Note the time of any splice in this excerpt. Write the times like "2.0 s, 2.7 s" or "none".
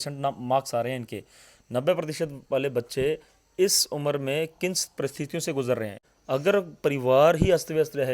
6.1 s